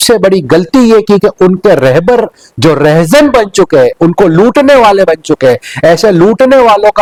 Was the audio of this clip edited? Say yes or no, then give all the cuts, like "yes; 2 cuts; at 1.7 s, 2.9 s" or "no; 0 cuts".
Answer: no; 0 cuts